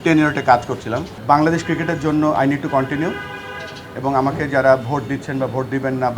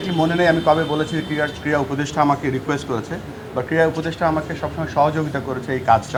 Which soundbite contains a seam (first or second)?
first